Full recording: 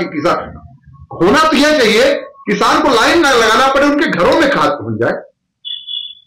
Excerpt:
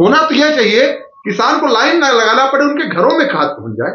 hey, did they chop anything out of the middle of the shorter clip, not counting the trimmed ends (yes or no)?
no